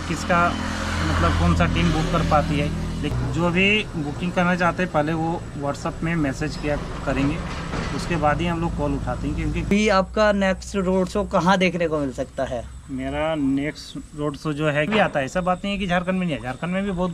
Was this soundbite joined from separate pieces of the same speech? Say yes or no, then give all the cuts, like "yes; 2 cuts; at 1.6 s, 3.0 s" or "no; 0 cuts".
yes; 3 cuts; at 3.1 s, 9.7 s, 14.9 s